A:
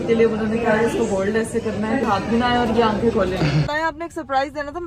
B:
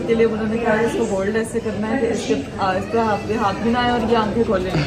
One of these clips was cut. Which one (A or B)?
A